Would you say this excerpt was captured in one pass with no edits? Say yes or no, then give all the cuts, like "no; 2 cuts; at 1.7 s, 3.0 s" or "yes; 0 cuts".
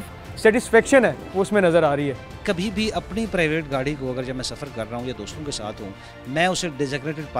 no; 1 cut; at 2.4 s